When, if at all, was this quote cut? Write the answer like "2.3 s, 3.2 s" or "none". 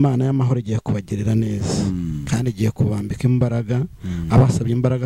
none